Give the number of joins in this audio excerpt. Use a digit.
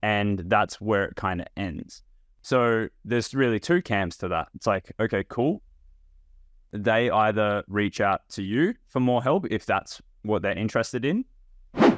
2